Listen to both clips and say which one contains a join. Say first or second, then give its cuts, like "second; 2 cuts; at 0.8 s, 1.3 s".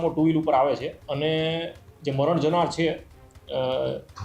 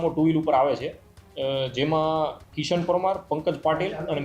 first; 1 cut; at 1.0 s